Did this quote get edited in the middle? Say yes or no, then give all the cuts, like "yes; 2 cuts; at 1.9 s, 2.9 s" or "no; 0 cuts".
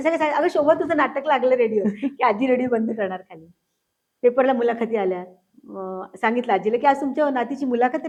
no; 0 cuts